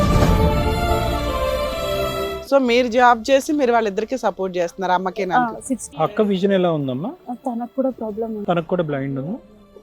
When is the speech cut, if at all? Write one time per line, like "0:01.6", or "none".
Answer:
0:02.3